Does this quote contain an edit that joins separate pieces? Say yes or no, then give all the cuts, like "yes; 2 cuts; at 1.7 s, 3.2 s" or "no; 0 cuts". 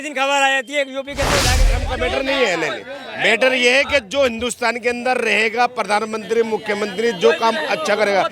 yes; 1 cut; at 1.6 s